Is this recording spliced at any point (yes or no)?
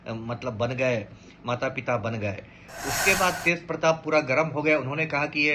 no